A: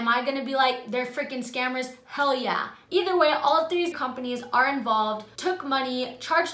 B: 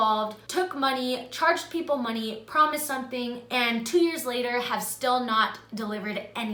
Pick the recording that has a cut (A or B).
A